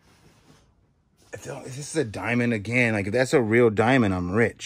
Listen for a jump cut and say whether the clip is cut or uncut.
uncut